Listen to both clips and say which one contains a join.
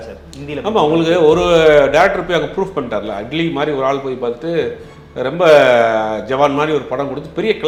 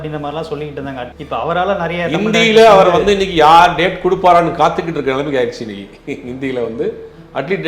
second; 1 cut; at 1.1 s

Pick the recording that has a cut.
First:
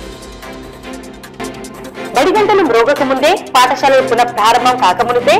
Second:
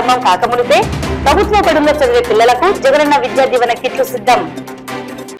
first; 1 cut; at 1.2 s

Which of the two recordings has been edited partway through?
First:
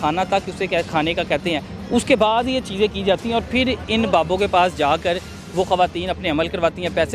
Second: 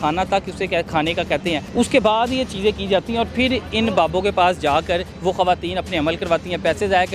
second; 2 cuts; at 1.7 s, 5.1 s

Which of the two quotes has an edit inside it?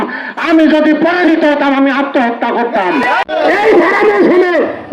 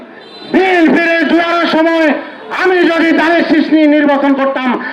first; 1 cut; at 3.2 s

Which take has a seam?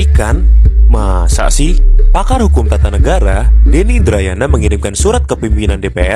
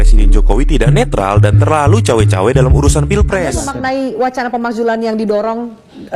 second; 1 cut; at 3.6 s

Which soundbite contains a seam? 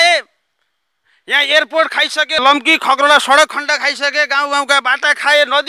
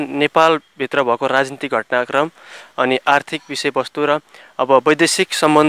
first; 1 cut; at 2.4 s

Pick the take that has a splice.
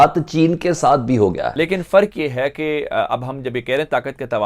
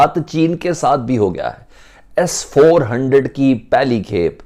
first; 1 cut; at 1.5 s

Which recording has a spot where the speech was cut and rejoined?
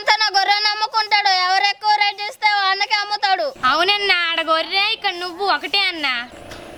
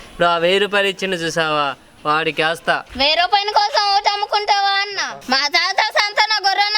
second; 1 cut; at 5.1 s

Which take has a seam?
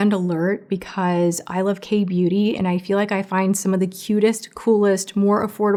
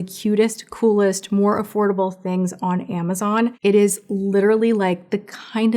second; 1 cut; at 3.6 s

